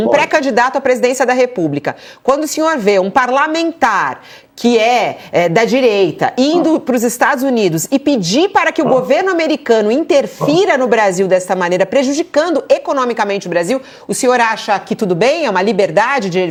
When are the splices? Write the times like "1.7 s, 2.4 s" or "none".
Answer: none